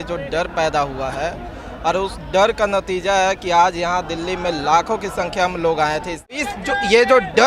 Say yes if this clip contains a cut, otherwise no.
yes